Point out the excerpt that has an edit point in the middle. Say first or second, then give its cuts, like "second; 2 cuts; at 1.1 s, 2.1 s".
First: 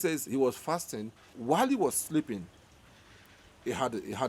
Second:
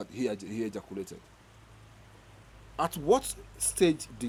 first; 1 cut; at 1.3 s